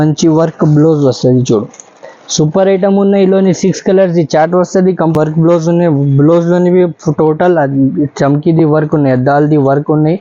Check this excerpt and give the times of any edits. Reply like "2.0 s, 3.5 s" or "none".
5.1 s